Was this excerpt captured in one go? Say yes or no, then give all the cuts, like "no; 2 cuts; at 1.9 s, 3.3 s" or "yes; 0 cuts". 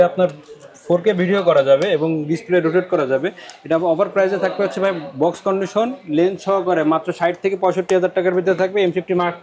yes; 0 cuts